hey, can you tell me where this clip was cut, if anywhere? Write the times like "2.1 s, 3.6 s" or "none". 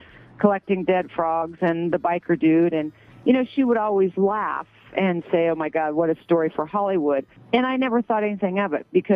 7.3 s